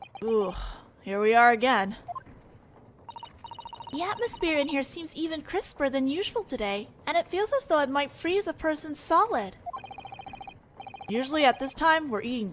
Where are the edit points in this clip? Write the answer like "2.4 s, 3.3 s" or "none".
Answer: none